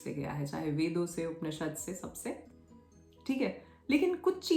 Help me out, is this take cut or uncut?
uncut